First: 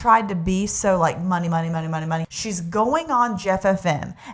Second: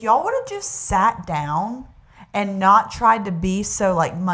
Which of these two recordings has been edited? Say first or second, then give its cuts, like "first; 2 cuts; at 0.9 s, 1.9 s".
first; 1 cut; at 2.3 s